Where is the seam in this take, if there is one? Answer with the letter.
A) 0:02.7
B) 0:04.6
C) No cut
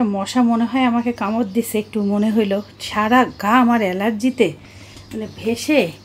C